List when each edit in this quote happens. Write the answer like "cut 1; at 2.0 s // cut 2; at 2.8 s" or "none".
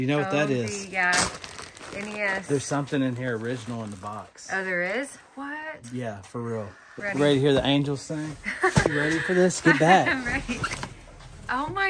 cut 1; at 6.9 s // cut 2; at 8.9 s